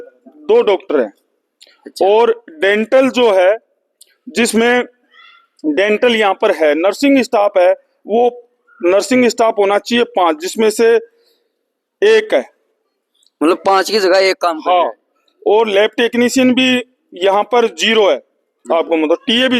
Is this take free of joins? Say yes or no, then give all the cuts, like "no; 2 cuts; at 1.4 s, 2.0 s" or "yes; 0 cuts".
yes; 0 cuts